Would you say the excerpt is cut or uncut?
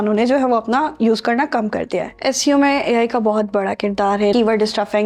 cut